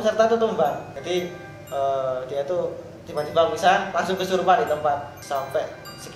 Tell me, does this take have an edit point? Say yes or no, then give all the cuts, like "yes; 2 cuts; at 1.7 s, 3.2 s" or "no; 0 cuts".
yes; 2 cuts; at 0.9 s, 5.2 s